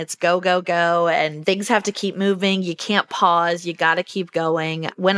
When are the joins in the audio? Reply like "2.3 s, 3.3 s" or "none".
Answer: 1.4 s